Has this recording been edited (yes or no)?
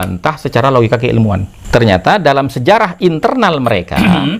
yes